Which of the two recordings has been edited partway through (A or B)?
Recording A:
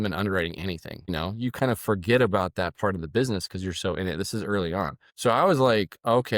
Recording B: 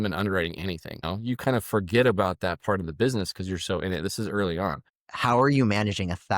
B